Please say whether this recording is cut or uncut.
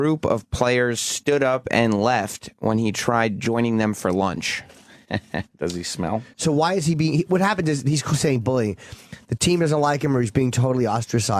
cut